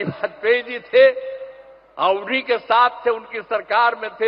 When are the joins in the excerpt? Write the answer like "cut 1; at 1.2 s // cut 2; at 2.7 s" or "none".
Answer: none